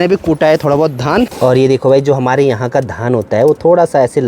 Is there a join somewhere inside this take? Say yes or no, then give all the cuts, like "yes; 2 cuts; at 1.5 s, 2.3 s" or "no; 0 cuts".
yes; 1 cut; at 1.3 s